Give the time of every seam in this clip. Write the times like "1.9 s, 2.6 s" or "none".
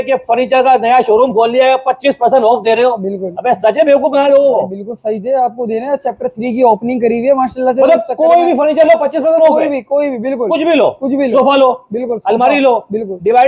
none